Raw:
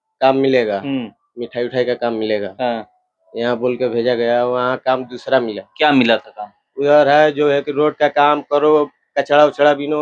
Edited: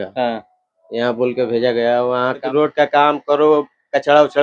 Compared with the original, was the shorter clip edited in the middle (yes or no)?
yes